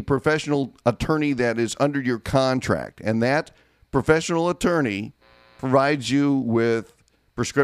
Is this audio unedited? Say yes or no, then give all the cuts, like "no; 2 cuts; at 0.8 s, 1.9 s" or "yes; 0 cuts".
yes; 0 cuts